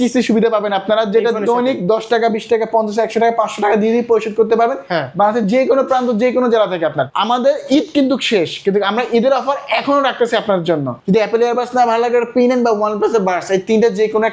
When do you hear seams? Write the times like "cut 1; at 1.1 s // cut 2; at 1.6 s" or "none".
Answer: cut 1; at 7.1 s // cut 2; at 10.9 s

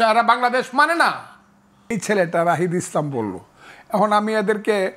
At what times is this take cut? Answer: cut 1; at 1.9 s

